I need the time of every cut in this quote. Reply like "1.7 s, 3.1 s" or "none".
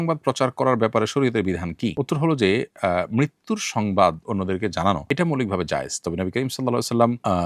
none